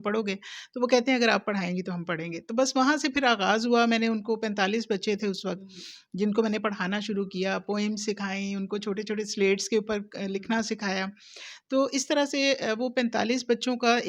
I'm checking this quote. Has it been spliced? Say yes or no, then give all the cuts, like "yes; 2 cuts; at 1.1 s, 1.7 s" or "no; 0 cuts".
no; 0 cuts